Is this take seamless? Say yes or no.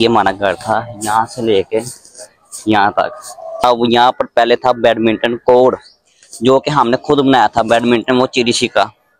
no